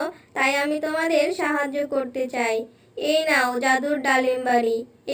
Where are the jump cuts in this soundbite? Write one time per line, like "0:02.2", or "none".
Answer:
none